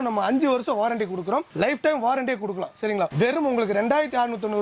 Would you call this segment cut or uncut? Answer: cut